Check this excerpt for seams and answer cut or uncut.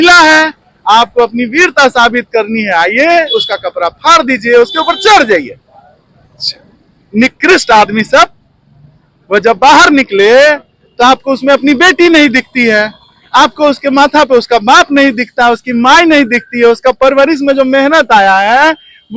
uncut